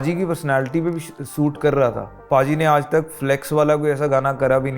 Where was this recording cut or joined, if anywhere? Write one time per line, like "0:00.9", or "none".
0:02.1